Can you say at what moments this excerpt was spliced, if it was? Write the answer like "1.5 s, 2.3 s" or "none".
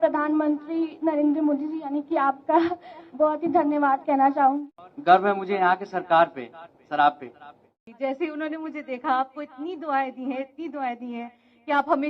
4.6 s, 7.8 s